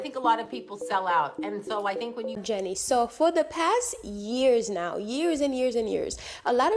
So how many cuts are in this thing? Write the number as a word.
one